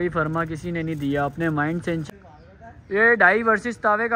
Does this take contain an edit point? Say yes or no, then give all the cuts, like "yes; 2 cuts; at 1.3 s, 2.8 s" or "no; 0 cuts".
yes; 1 cut; at 2.0 s